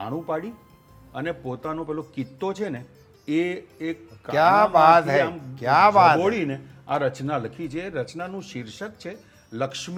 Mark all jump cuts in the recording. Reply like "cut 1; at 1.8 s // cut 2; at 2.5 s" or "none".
none